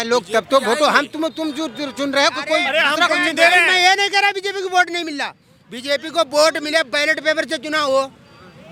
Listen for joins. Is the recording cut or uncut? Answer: uncut